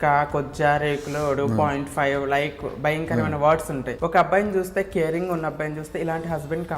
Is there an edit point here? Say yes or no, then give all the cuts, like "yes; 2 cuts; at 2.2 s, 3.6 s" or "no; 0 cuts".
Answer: yes; 1 cut; at 3.9 s